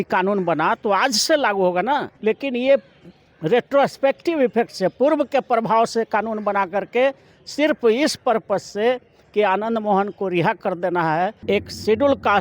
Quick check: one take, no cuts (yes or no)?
no